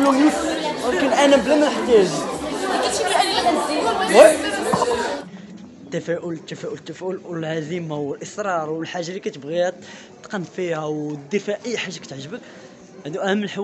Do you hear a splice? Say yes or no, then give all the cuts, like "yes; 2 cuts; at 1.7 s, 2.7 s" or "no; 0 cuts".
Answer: yes; 1 cut; at 5.2 s